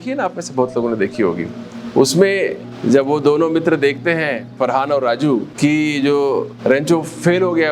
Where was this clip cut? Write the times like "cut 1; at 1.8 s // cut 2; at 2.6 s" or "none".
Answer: cut 1; at 2.7 s // cut 2; at 4.4 s // cut 3; at 5.5 s // cut 4; at 6.5 s